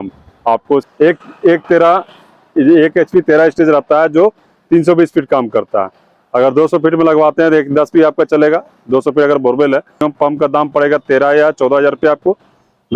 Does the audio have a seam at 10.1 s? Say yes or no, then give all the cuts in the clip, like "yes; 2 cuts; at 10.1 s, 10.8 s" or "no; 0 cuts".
yes; 2 cuts; at 0.8 s, 10.1 s